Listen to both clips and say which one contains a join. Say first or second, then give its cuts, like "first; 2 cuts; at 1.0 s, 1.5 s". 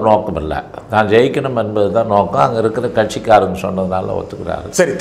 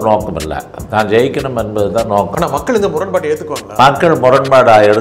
second; 1 cut; at 2.3 s